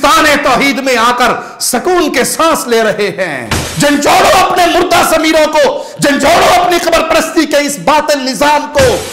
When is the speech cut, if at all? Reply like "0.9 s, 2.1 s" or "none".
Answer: 3.6 s